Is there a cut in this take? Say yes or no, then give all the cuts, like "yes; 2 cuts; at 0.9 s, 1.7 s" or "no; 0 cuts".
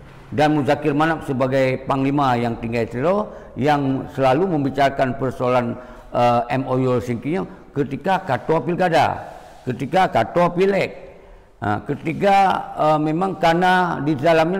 no; 0 cuts